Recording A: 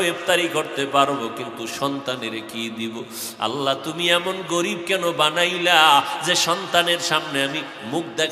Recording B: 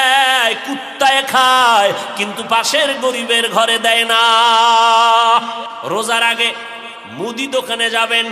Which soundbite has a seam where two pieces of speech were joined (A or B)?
B